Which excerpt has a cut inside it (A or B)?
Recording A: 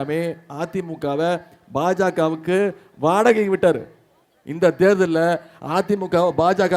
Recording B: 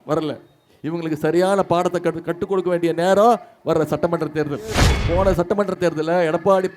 B